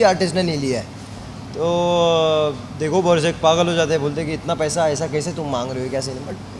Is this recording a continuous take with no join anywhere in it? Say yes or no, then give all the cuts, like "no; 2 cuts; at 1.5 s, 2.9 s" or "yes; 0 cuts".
yes; 0 cuts